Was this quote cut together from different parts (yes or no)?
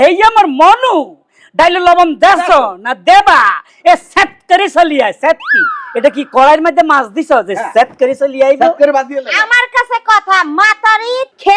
no